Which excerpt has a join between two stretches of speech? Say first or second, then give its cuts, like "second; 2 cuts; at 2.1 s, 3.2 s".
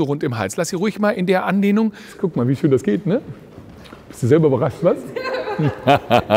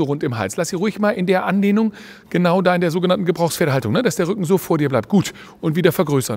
first; 1 cut; at 2.1 s